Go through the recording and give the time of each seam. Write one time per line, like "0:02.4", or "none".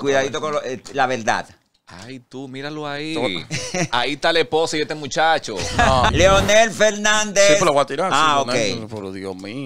0:06.1